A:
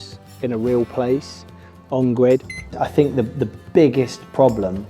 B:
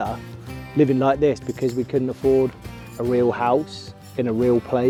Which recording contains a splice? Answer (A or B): A